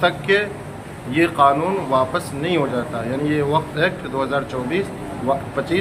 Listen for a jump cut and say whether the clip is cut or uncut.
uncut